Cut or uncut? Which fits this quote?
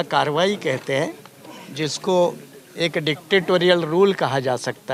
uncut